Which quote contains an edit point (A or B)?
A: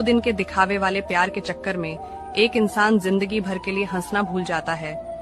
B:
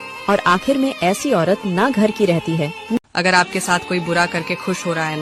B